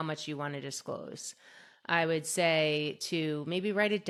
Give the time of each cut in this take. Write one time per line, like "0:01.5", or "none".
none